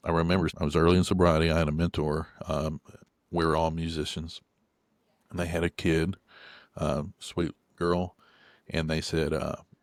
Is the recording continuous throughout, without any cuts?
yes; 0 cuts

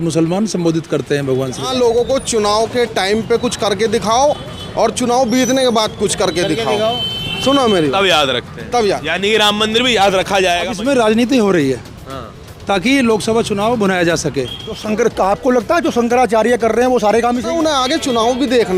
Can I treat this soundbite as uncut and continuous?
no; 4 cuts; at 1.6 s, 10.7 s, 14.8 s, 17.5 s

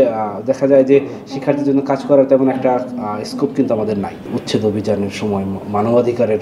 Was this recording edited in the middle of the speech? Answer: yes; 1 cut; at 4.3 s

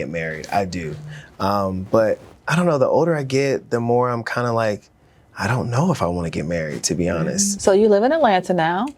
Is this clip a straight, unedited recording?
no; 1 cut; at 7.5 s

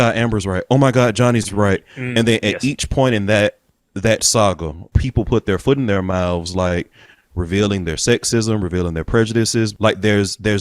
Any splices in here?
yes; 3 cuts; at 2.0 s, 4.9 s, 9.7 s

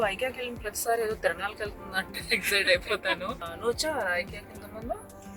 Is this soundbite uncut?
no; 1 cut; at 3.5 s

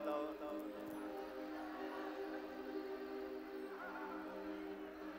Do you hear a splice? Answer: no; 0 cuts

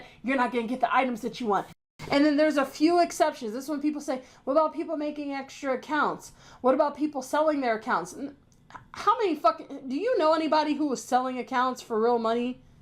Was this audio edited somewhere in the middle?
yes; 1 cut; at 1.8 s

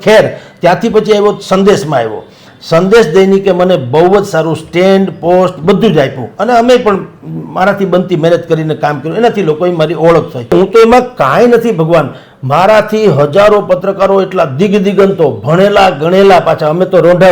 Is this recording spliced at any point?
yes; 1 cut; at 10.5 s

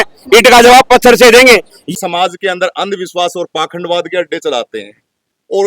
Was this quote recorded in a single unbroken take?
no; 1 cut; at 1.8 s

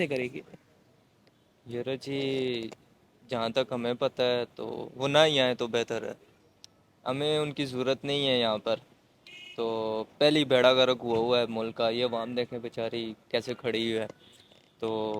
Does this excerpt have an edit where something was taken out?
no; 0 cuts

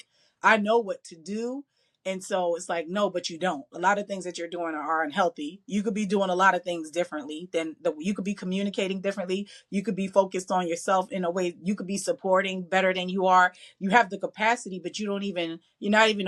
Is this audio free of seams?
yes; 0 cuts

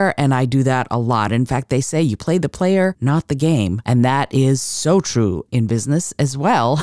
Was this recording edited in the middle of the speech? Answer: yes; 2 cuts; at 3.3 s, 5.5 s

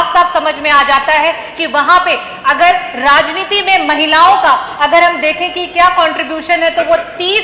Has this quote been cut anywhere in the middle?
no; 0 cuts

